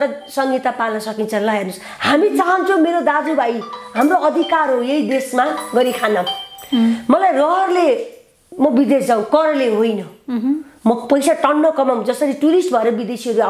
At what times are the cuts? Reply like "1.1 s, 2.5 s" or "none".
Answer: none